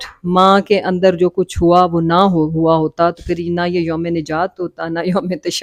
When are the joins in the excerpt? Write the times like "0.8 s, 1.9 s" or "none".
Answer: none